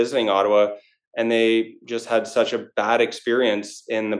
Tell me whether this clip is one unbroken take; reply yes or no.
yes